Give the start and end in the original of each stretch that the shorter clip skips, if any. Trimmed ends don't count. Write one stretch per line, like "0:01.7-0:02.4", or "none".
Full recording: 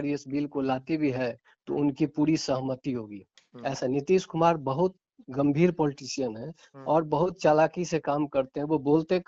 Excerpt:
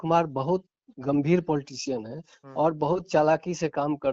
none